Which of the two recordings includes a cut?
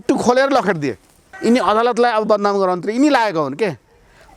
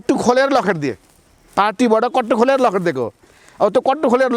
first; 1 cut; at 1.2 s

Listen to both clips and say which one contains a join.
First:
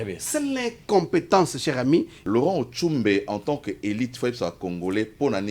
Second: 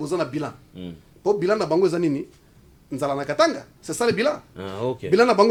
first; 1 cut; at 2.2 s

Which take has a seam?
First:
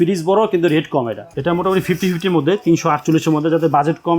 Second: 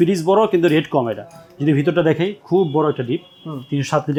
first; 1 cut; at 1.2 s

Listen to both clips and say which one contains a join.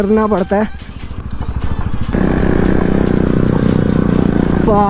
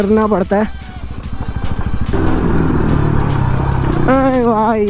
first; 1 cut; at 2.1 s

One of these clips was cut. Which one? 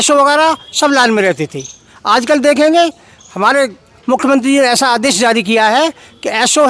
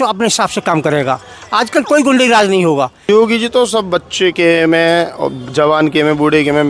second; 1 cut; at 3.1 s

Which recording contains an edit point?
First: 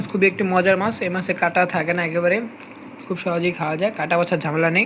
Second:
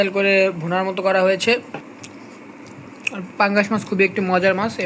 second; 1 cut; at 1.8 s

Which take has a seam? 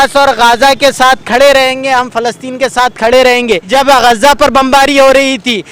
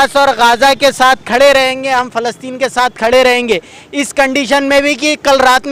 first; 1 cut; at 3.6 s

